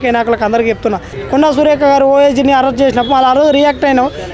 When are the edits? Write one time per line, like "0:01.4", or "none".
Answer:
0:01.1